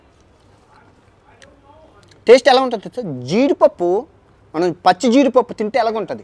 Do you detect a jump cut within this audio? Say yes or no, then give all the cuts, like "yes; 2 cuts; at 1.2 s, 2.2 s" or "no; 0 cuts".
no; 0 cuts